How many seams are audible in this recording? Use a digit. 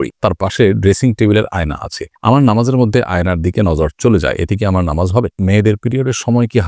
1